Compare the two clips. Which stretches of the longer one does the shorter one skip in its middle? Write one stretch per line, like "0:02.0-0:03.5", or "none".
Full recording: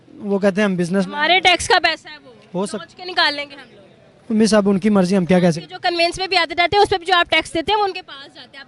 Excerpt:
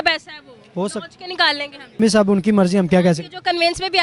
0:03.8-0:04.4